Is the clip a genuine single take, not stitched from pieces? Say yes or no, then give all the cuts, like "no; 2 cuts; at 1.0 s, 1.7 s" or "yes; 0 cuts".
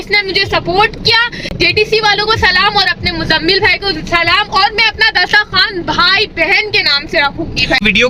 yes; 0 cuts